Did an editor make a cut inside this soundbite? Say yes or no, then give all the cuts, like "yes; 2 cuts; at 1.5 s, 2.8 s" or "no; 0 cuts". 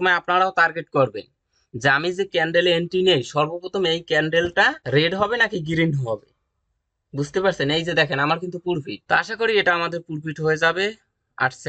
yes; 2 cuts; at 4.8 s, 8.9 s